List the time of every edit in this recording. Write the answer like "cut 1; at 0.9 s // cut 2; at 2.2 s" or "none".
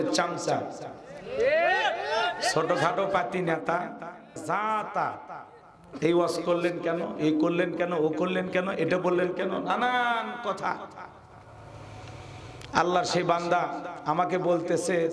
cut 1; at 4.4 s